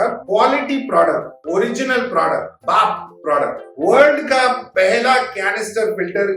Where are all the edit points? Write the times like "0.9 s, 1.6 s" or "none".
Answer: 2.5 s, 3.7 s